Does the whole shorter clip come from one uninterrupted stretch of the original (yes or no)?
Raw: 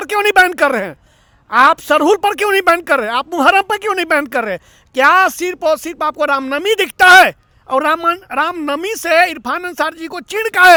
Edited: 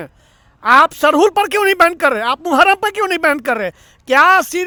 yes